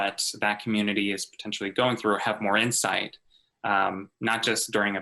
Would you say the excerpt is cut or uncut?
uncut